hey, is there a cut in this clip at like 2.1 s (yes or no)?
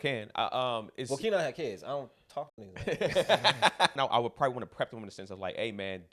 no